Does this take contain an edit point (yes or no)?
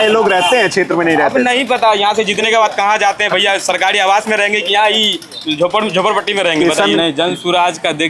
yes